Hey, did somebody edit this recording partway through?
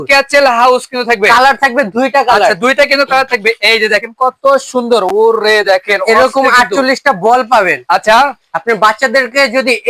no; 0 cuts

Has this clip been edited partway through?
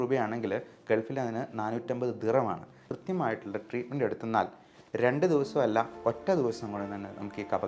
yes; 1 cut; at 2.8 s

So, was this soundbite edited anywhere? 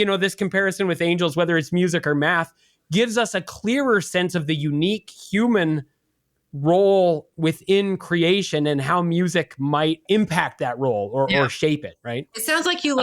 yes; 1 cut; at 10.0 s

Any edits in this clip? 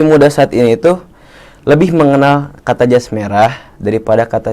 no; 0 cuts

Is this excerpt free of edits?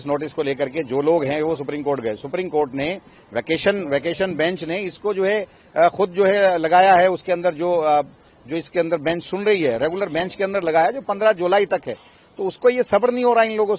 yes; 0 cuts

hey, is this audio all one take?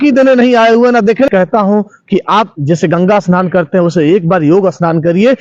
no; 1 cut; at 1.3 s

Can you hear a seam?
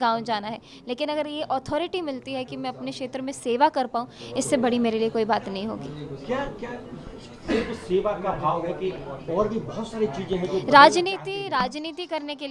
no; 0 cuts

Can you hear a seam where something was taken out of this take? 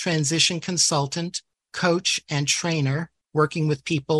yes; 1 cut; at 3.1 s

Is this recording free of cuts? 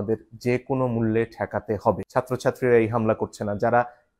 no; 1 cut; at 2.0 s

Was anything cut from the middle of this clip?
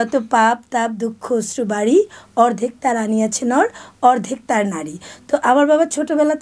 no; 0 cuts

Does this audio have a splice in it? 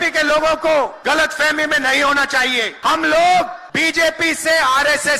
yes; 3 cuts; at 1.0 s, 2.7 s, 3.6 s

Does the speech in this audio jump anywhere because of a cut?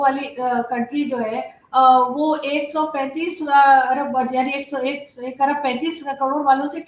no; 0 cuts

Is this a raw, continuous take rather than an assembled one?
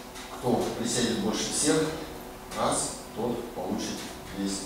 yes; 0 cuts

